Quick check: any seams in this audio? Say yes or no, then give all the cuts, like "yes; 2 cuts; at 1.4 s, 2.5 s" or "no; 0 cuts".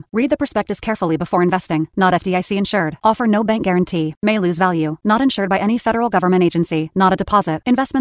no; 0 cuts